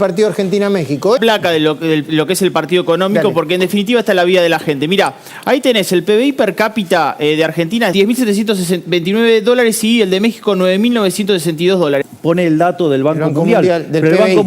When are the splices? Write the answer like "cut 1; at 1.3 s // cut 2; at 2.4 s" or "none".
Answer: cut 1; at 1.2 s // cut 2; at 7.9 s // cut 3; at 12.1 s